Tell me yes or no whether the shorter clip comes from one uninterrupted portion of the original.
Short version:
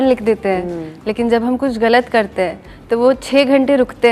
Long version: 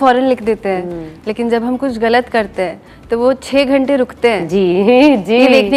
yes